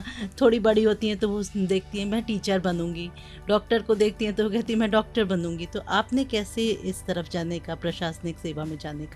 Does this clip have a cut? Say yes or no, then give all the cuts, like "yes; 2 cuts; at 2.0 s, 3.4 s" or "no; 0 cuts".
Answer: no; 0 cuts